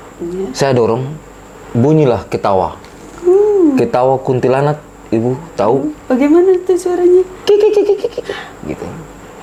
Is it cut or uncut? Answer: uncut